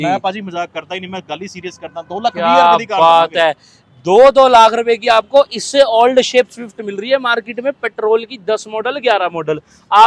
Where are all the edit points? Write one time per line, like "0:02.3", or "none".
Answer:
none